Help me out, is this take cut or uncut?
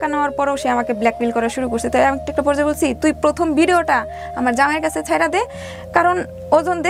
uncut